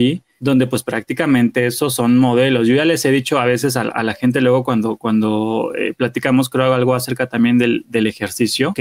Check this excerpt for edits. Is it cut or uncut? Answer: uncut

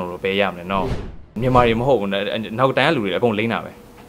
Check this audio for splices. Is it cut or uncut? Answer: cut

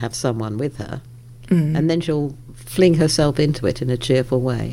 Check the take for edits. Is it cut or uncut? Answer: uncut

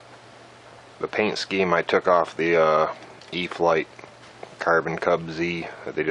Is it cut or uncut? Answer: cut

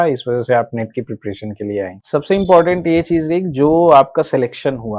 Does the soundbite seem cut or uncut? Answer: cut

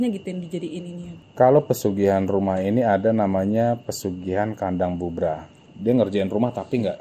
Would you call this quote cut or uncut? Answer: cut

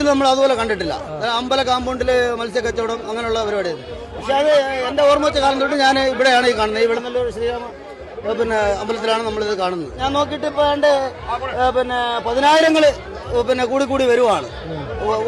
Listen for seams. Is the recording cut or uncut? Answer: uncut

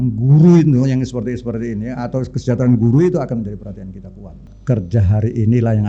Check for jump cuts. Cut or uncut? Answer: cut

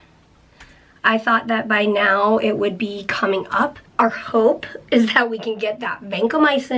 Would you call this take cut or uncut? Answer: cut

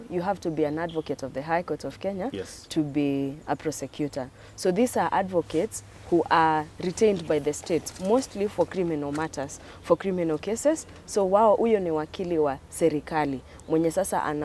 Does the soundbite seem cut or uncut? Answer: uncut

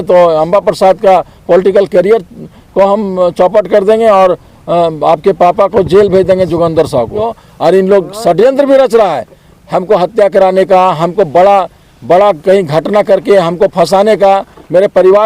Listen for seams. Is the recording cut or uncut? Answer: cut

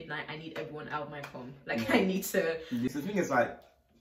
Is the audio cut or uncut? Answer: cut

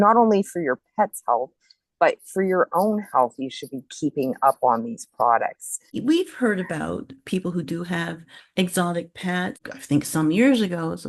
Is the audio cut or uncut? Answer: cut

